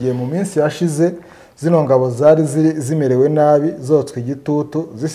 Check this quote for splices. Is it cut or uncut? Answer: uncut